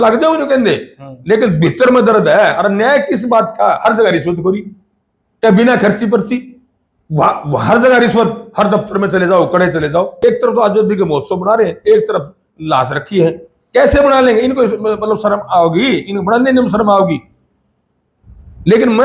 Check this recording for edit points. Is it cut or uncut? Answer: cut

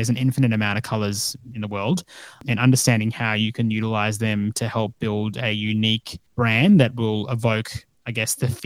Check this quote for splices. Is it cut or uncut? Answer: cut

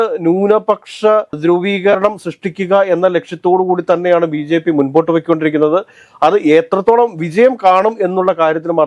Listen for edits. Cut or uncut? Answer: uncut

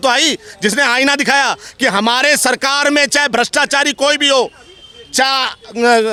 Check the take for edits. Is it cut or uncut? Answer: uncut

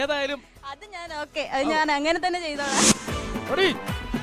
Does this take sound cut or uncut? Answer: cut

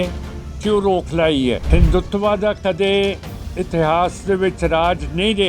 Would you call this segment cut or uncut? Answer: cut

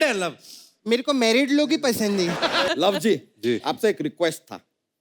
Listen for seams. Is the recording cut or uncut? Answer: cut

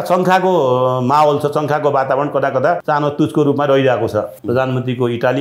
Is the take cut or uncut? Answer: cut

